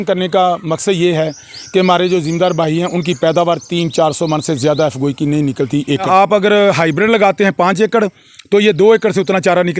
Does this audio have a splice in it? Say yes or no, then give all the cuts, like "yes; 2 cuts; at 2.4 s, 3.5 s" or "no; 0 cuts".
yes; 1 cut; at 6.0 s